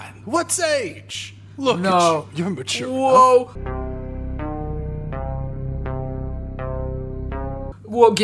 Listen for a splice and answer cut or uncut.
uncut